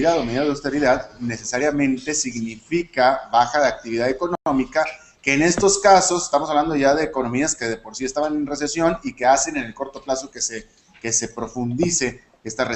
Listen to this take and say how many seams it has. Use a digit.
1